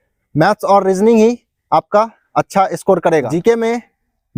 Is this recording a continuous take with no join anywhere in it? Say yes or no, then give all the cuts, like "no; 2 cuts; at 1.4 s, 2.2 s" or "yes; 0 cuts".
no; 1 cut; at 3.4 s